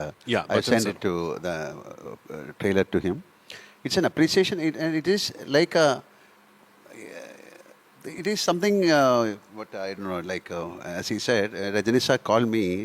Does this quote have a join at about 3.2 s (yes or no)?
no